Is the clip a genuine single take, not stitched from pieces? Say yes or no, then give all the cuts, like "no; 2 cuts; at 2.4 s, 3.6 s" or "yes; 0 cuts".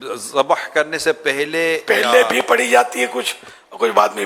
yes; 0 cuts